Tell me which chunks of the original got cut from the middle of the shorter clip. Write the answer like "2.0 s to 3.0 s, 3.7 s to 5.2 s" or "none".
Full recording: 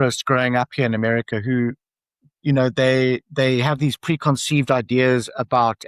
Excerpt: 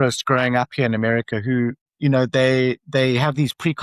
1.9 s to 2.3 s